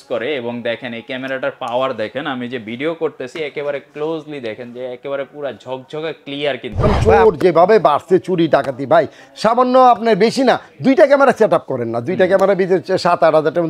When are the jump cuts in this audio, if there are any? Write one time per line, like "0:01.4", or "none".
0:06.9